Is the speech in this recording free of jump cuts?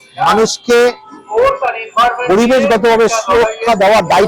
yes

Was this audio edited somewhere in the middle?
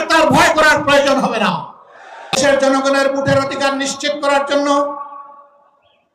yes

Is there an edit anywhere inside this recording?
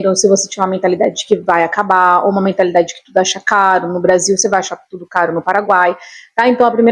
no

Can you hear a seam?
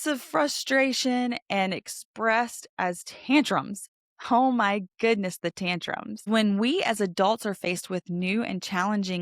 yes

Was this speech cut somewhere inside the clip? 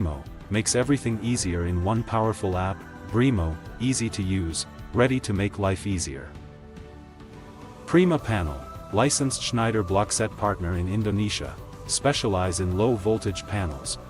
yes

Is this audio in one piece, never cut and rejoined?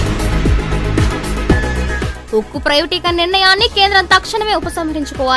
no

